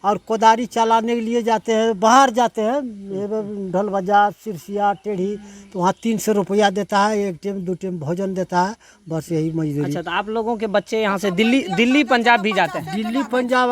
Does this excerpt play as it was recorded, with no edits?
yes; 0 cuts

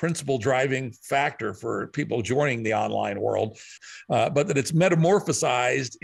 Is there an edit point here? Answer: yes; 1 cut; at 3.7 s

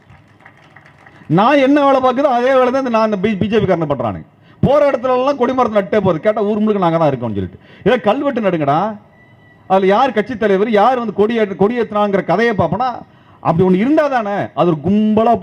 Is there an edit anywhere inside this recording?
no; 0 cuts

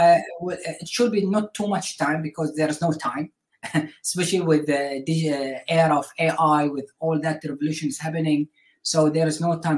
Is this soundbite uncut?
yes; 0 cuts

